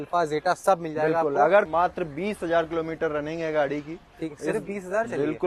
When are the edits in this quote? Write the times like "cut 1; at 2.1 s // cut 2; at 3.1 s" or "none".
cut 1; at 1.7 s